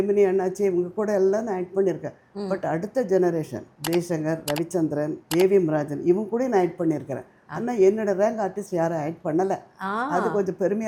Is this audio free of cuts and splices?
yes; 0 cuts

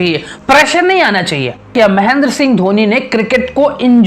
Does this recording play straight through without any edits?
no; 1 cut; at 1.7 s

